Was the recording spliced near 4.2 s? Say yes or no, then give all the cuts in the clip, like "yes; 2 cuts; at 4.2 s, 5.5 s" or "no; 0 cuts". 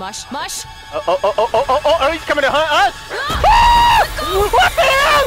yes; 1 cut; at 4.2 s